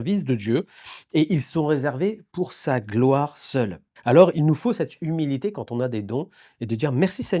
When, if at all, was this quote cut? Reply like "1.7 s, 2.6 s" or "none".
3.9 s